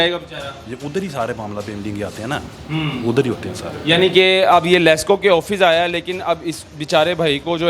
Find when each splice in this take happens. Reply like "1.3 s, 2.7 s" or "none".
none